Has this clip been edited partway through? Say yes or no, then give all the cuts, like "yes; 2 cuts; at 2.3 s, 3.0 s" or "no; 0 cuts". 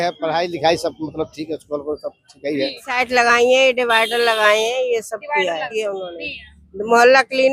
yes; 2 cuts; at 2.9 s, 5.7 s